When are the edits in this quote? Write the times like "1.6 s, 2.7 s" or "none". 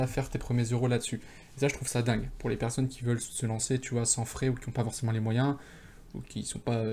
none